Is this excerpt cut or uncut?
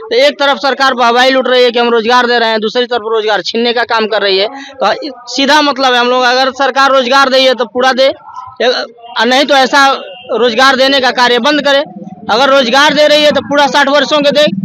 uncut